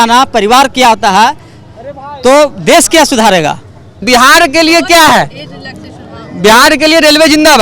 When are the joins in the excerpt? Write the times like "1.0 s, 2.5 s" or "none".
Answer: 4.0 s